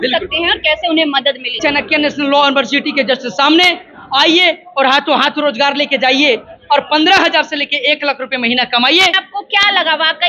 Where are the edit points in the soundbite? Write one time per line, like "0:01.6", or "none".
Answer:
0:01.6
0:09.2